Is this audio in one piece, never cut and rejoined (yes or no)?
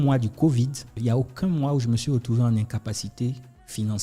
no